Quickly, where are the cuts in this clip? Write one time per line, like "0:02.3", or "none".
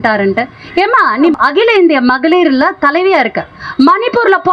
0:01.3
0:03.6

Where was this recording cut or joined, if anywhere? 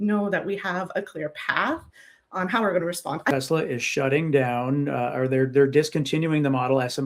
0:03.3

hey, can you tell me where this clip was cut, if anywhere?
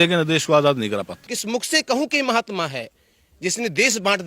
0:01.2

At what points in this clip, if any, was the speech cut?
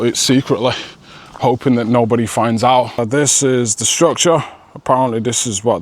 0:03.0

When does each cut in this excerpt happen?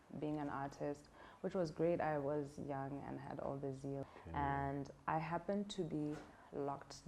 0:04.0

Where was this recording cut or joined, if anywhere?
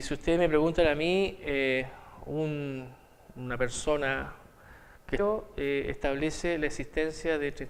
none

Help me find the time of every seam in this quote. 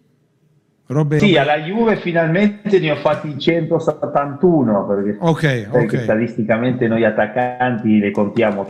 0:01.2

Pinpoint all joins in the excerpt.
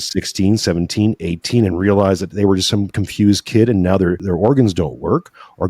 0:04.2

